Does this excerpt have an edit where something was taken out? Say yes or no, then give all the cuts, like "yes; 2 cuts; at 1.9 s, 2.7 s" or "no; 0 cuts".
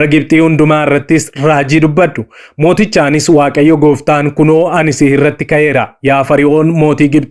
no; 0 cuts